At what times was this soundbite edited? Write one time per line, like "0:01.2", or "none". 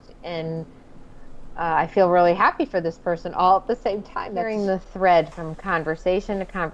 0:04.4

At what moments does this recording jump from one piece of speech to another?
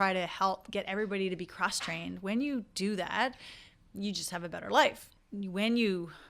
0:05.1

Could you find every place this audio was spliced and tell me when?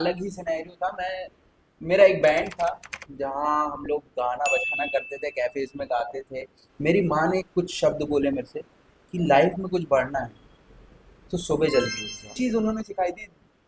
0:06.6
0:12.3

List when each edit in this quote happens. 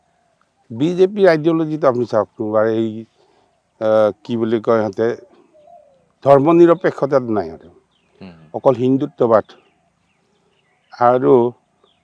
none

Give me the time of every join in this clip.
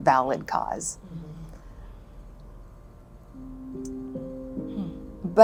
none

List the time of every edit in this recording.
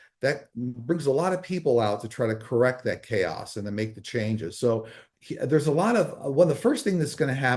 0:05.0

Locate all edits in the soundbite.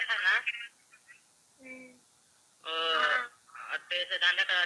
none

